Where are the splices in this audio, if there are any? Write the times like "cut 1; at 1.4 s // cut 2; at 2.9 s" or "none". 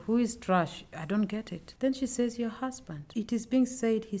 cut 1; at 3.0 s